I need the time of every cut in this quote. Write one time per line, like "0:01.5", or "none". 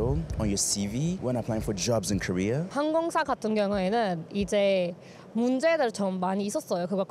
0:01.2
0:02.7